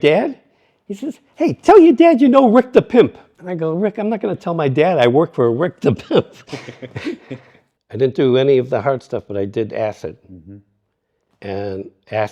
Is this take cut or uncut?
cut